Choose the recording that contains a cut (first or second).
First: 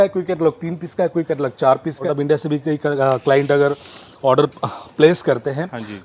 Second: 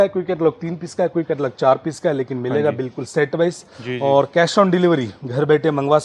first